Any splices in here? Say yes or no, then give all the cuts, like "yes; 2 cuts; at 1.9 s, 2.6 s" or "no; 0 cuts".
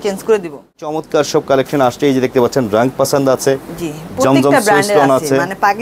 yes; 1 cut; at 1.0 s